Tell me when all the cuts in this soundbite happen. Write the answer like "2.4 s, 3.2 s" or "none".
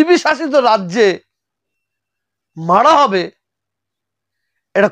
none